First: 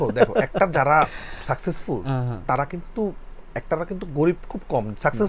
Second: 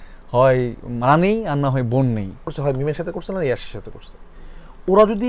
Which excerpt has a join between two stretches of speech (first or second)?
second